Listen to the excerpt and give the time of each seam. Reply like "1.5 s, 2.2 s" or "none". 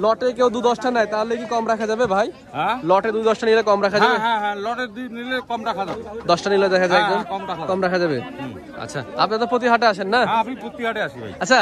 none